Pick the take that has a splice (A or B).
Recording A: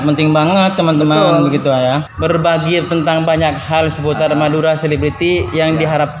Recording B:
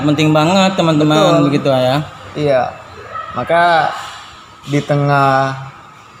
A